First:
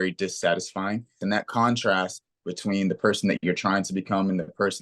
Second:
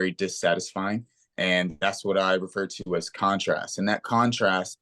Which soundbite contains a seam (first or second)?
first